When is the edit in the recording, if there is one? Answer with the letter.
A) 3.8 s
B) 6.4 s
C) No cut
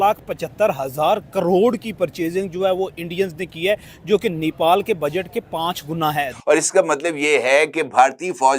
B